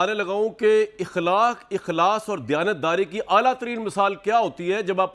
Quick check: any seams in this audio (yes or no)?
no